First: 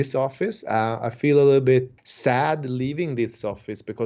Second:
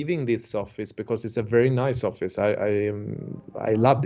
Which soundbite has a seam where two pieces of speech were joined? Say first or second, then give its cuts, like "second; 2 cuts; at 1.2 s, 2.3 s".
first; 1 cut; at 1.9 s